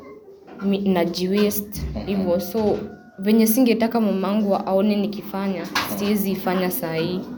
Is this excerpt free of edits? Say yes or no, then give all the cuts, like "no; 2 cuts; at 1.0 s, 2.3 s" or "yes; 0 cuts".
yes; 0 cuts